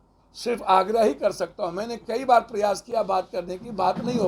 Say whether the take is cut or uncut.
uncut